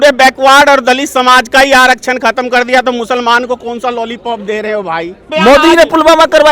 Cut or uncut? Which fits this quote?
cut